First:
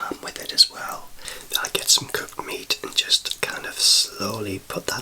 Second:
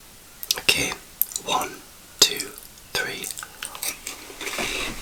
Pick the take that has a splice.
first; 1 cut; at 1.3 s

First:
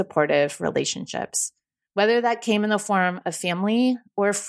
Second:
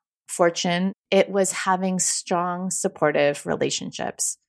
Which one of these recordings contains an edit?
second; 1 cut; at 0.9 s

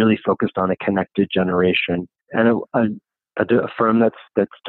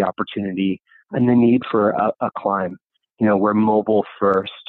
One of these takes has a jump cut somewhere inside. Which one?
first; 1 cut; at 2.2 s

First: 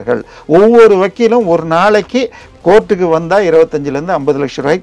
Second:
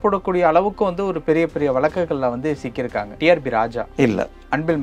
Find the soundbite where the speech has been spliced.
second; 2 cuts; at 3.1 s, 3.8 s

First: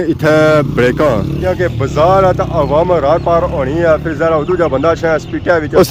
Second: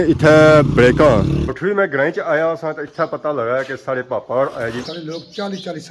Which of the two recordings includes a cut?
second; 2 cuts; at 1.3 s, 4.8 s

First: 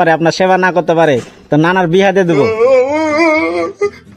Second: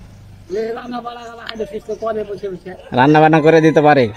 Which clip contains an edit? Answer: first; 1 cut; at 2.5 s

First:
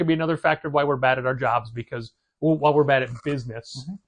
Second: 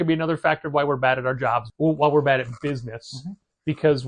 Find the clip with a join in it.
second; 1 cut; at 1.7 s

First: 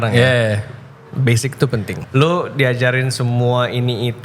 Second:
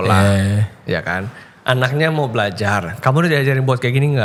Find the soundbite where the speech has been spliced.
first; 1 cut; at 1.9 s

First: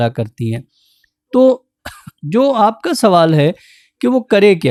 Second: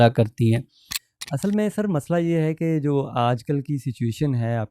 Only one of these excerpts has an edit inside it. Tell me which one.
second; 1 cut; at 1.1 s

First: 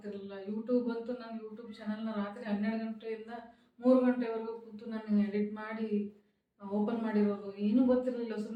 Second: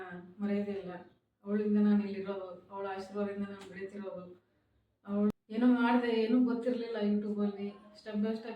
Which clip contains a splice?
second; 1 cut; at 5.3 s

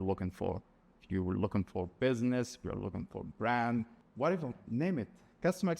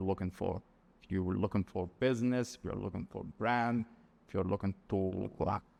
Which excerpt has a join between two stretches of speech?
first; 1 cut; at 4.0 s

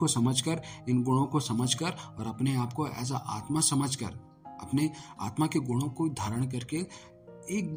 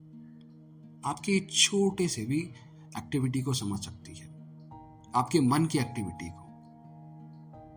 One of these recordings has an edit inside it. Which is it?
second; 1 cut; at 1.0 s

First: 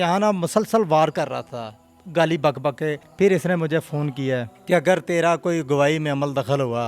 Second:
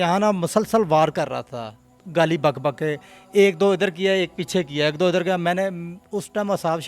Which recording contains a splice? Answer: first; 2 cuts; at 3.1 s, 4.5 s

